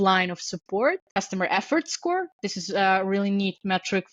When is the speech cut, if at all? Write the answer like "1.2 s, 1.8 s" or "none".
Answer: 1.1 s